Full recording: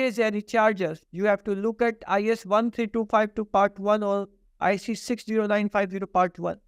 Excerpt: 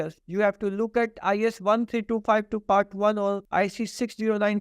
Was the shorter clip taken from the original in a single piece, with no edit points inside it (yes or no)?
no